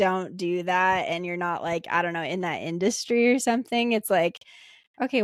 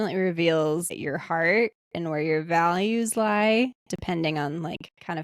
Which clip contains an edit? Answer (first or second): second